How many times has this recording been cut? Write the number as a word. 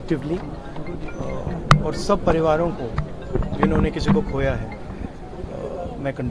zero